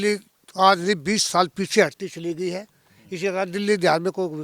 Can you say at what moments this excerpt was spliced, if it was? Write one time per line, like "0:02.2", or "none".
none